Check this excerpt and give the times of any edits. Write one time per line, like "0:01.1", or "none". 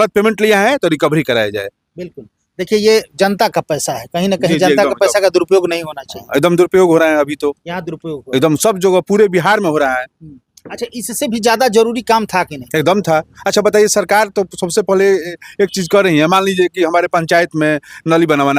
none